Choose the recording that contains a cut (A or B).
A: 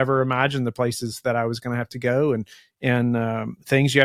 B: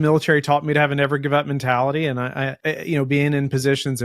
B